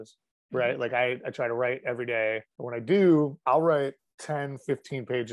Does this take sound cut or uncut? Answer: cut